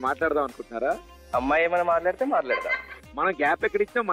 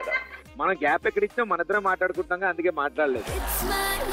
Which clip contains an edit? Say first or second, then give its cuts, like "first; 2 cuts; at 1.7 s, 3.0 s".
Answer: first; 1 cut; at 1.1 s